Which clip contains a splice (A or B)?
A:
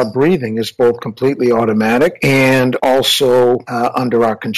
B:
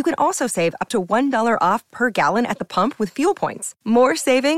A